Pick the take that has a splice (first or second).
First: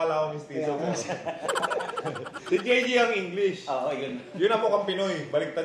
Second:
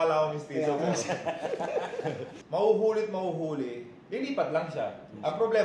second